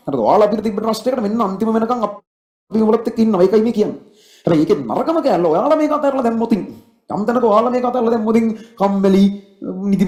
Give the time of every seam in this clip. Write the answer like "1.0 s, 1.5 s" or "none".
none